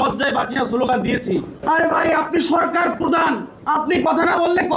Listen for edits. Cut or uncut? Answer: cut